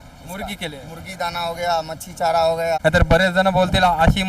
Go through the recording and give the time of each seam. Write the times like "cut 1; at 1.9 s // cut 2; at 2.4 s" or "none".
cut 1; at 2.8 s